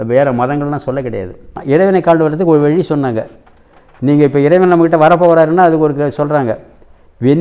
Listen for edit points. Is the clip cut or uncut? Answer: cut